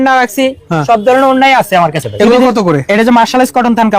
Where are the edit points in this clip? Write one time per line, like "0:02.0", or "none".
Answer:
0:02.0

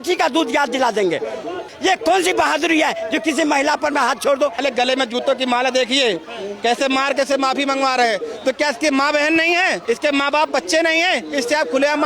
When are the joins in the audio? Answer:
0:01.7
0:04.6
0:09.8

